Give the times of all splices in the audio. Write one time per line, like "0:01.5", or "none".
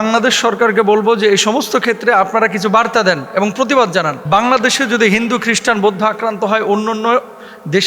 0:04.2